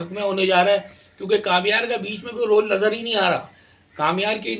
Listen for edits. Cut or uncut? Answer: uncut